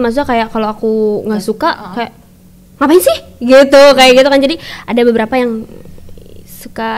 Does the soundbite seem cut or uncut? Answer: uncut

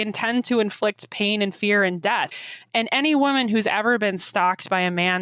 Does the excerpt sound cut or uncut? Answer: uncut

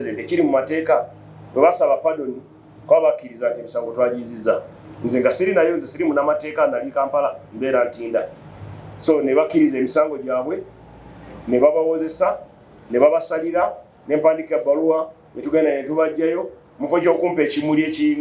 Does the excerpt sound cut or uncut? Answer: uncut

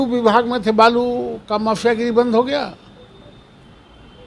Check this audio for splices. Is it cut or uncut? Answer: uncut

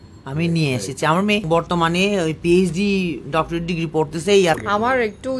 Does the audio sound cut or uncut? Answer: cut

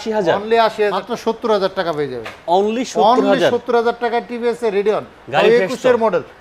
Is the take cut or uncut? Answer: cut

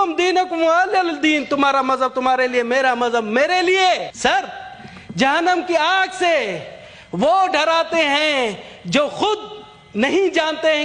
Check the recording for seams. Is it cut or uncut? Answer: cut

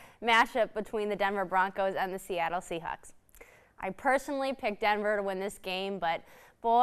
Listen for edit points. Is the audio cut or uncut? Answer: uncut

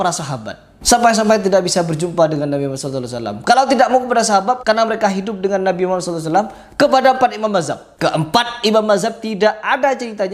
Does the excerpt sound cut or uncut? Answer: uncut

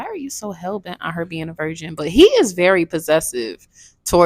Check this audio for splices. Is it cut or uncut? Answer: uncut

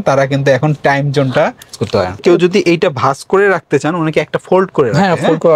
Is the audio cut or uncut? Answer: cut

